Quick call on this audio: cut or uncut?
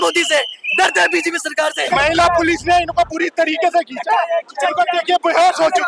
cut